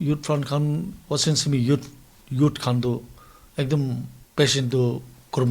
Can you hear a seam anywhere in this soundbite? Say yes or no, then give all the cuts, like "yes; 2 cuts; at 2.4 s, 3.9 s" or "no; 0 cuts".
yes; 1 cut; at 4.2 s